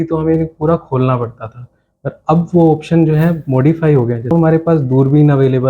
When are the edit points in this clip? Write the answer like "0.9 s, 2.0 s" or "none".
4.3 s